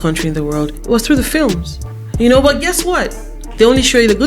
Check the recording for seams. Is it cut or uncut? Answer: cut